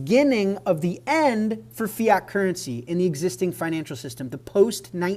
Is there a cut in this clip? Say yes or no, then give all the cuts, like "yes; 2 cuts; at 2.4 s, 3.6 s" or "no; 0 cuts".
no; 0 cuts